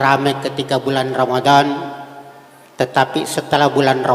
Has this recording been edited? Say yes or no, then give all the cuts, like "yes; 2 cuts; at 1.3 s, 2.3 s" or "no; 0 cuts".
no; 0 cuts